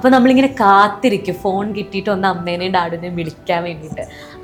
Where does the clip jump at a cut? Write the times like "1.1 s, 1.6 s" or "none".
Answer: none